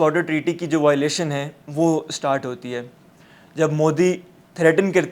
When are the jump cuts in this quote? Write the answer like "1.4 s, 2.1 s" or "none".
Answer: none